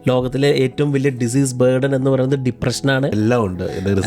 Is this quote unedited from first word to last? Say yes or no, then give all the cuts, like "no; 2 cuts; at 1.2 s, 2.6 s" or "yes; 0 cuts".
no; 1 cut; at 3.1 s